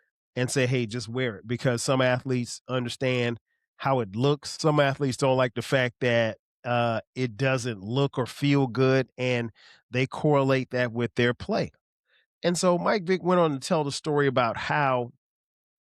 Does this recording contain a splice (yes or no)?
no